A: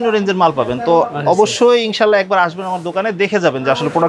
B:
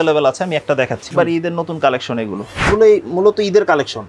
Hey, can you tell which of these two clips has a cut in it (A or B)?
B